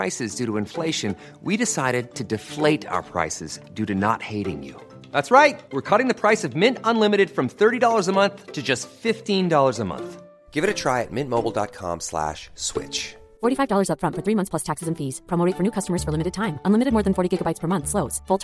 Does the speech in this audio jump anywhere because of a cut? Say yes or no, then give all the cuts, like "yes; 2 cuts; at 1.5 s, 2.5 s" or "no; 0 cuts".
no; 0 cuts